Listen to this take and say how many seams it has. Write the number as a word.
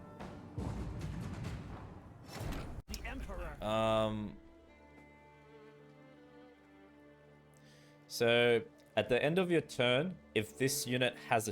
one